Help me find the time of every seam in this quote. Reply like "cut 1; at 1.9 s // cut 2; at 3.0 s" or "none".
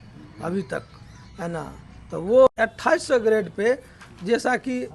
cut 1; at 2.5 s